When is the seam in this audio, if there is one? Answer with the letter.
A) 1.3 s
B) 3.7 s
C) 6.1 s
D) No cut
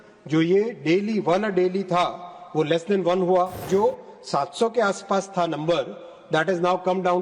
B